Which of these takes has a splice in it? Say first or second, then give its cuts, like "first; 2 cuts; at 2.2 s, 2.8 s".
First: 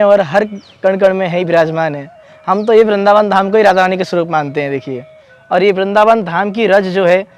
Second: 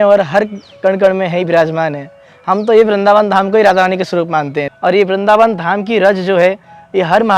second; 1 cut; at 4.7 s